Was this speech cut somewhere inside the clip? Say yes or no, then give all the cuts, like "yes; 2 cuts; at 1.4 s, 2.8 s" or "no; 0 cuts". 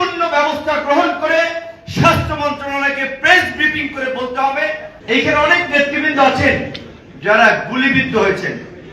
yes; 1 cut; at 4.9 s